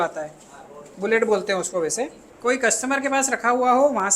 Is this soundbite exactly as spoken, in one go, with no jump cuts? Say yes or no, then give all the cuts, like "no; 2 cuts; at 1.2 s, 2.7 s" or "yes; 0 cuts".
no; 1 cut; at 2.2 s